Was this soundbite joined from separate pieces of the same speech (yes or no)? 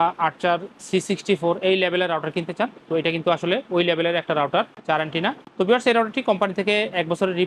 yes